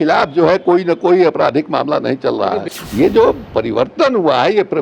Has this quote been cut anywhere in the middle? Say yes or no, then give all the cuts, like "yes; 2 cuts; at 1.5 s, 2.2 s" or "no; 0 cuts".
yes; 1 cut; at 2.7 s